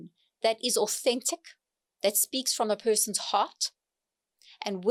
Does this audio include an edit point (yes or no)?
no